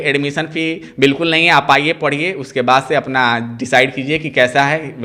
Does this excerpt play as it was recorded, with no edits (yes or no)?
yes